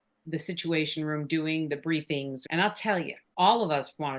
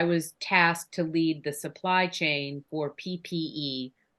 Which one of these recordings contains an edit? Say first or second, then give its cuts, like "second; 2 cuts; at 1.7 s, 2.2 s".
first; 2 cuts; at 2.4 s, 3.2 s